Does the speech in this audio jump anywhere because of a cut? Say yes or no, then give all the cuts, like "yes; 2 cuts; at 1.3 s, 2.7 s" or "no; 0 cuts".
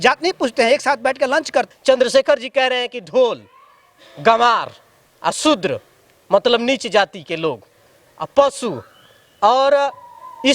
yes; 1 cut; at 1.7 s